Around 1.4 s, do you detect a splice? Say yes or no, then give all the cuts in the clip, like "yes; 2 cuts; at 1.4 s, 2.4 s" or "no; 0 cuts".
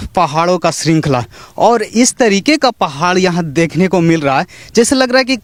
no; 0 cuts